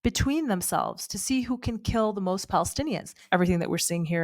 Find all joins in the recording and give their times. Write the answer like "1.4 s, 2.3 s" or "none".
3.1 s